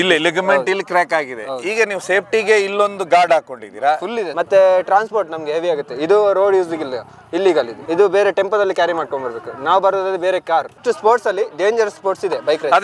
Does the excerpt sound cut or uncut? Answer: cut